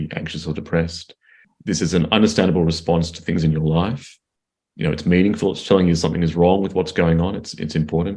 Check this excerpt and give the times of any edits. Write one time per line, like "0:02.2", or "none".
0:01.5